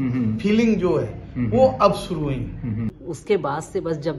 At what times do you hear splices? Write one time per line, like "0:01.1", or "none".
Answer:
0:03.0